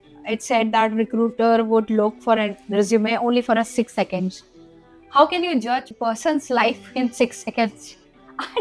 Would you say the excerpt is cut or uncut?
cut